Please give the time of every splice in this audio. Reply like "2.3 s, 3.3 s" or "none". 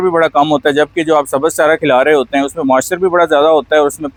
none